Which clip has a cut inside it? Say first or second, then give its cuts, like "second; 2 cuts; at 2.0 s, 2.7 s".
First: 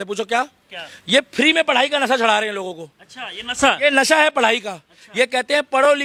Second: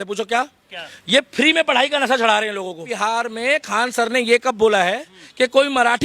second; 1 cut; at 2.9 s